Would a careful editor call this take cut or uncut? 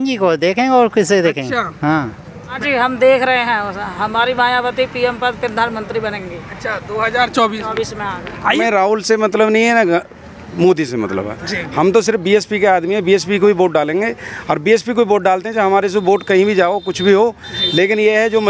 cut